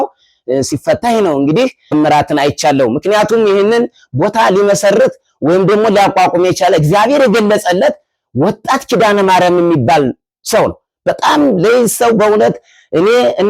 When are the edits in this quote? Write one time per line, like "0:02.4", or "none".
0:01.9